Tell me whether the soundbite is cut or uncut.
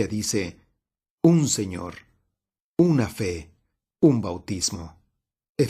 uncut